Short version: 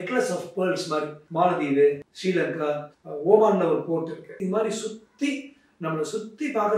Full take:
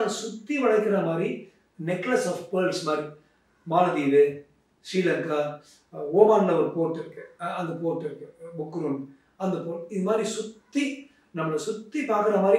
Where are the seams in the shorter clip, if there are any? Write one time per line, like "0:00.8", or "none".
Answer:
0:01.2
0:02.6
0:04.3